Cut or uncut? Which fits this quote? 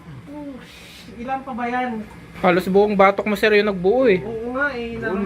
cut